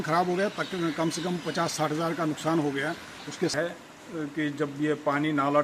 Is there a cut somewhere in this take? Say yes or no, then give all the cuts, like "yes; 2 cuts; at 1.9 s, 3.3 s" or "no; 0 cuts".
yes; 1 cut; at 3.5 s